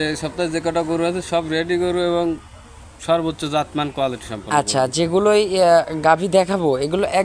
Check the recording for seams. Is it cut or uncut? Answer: uncut